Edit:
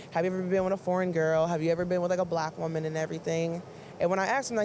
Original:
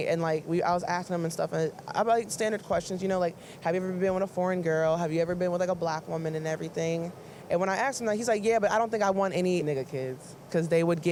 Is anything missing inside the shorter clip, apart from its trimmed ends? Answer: no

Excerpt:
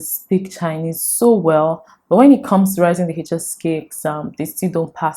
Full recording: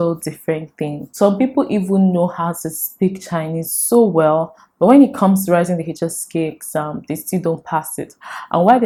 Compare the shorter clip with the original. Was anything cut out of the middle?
no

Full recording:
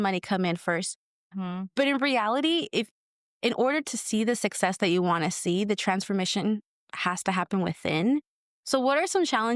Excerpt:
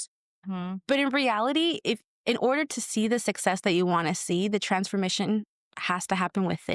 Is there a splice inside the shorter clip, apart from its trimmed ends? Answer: yes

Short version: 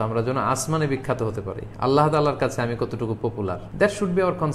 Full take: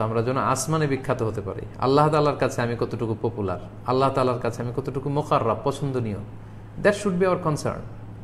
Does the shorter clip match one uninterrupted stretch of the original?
no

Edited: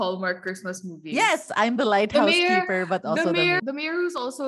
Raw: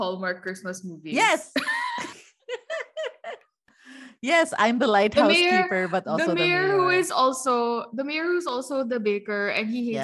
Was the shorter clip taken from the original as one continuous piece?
no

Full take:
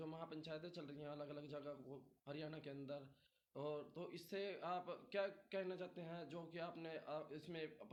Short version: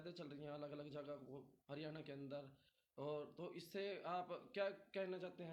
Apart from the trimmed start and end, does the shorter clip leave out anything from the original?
no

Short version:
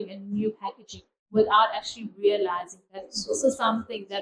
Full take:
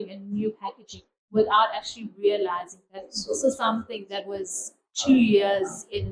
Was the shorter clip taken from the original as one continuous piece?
yes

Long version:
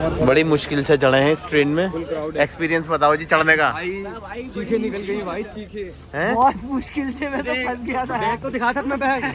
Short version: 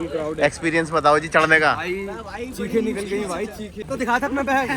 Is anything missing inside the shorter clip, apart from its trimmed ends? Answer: yes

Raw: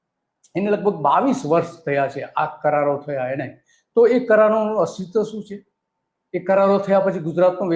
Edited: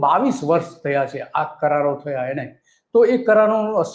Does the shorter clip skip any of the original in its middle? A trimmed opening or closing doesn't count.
no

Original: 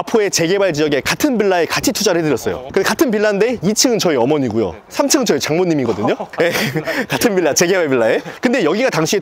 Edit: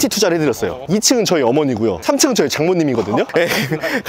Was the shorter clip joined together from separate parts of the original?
yes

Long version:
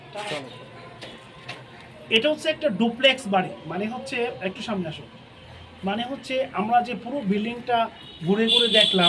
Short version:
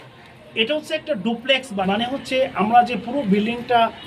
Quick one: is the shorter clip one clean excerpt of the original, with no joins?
no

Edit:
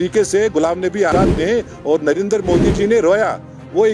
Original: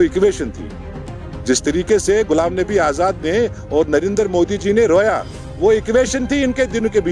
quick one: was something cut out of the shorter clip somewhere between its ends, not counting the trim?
yes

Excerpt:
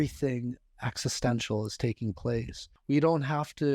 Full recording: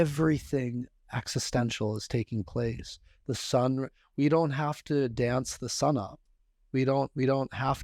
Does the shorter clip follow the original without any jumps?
no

